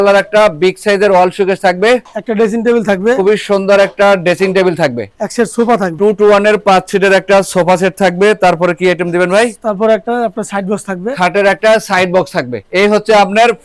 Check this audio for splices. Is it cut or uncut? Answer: uncut